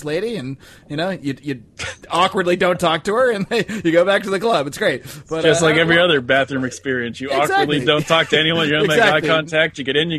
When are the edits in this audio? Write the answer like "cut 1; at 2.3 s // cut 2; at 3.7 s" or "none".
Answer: none